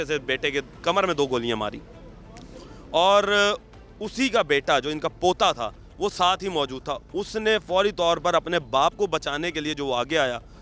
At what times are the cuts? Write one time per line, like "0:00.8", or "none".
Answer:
none

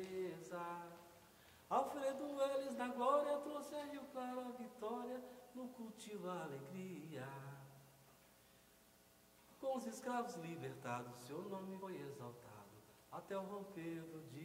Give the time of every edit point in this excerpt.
0:11.8

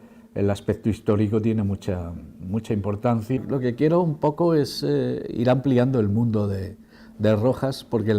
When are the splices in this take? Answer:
0:03.4

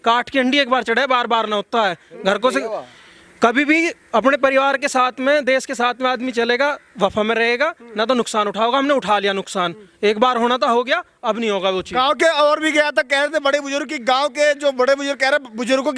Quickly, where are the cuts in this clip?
none

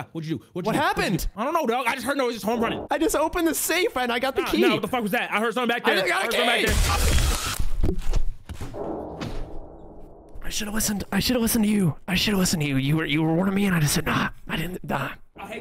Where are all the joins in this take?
none

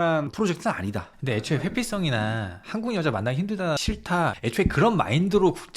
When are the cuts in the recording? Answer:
0:04.2

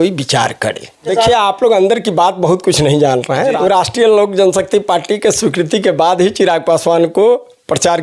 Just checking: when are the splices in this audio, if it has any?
0:01.1
0:03.6

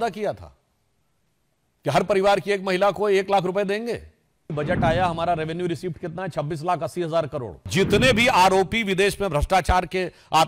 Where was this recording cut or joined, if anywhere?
0:04.5
0:07.7

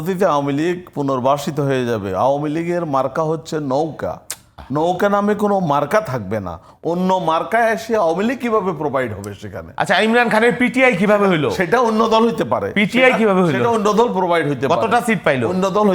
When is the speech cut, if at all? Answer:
none

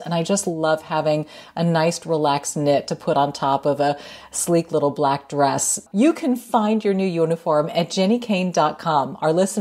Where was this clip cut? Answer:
0:05.8

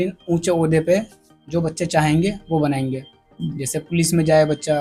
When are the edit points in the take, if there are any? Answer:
none

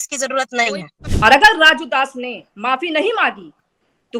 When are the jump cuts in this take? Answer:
0:01.0

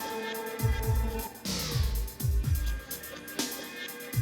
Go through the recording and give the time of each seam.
0:01.1

